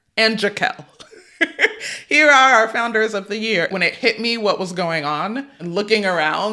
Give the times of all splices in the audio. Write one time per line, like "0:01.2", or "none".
0:03.7